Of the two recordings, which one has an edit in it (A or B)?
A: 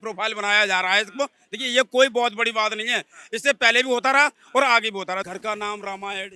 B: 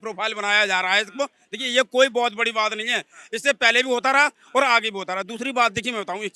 A